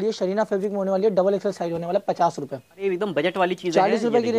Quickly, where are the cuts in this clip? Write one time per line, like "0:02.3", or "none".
0:02.8